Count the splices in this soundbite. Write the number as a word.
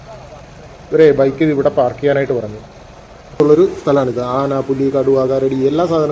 one